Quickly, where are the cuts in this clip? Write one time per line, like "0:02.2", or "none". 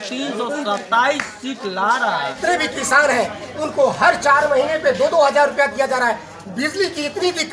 0:02.3